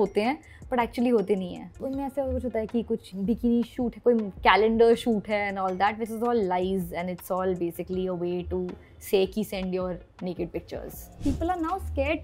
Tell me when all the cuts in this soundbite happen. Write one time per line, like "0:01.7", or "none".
0:01.7
0:11.2